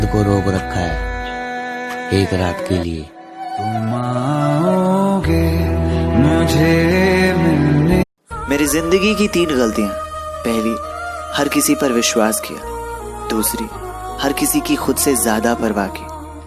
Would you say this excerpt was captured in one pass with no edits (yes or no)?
no